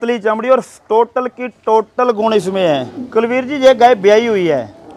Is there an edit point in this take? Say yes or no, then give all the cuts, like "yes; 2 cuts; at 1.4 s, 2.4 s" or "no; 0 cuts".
yes; 1 cut; at 3.0 s